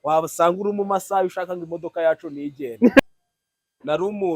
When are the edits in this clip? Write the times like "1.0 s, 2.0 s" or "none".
3.0 s